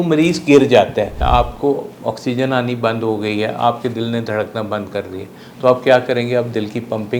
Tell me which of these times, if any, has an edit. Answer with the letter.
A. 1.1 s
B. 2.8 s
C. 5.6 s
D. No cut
A